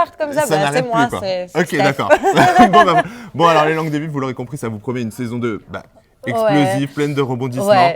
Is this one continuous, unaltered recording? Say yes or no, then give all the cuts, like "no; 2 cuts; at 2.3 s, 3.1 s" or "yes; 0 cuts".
yes; 0 cuts